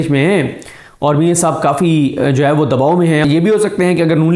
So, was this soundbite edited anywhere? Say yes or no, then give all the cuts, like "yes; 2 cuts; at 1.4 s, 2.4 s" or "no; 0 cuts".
yes; 1 cut; at 3.2 s